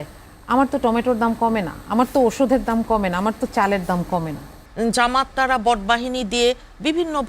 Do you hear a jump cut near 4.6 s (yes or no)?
yes